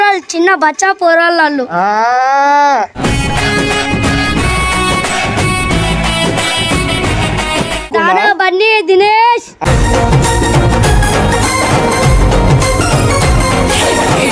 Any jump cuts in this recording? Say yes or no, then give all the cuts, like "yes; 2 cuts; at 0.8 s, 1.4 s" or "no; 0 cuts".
yes; 1 cut; at 7.9 s